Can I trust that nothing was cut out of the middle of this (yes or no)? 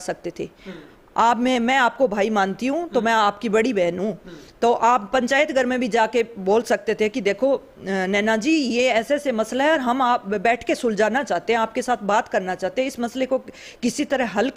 yes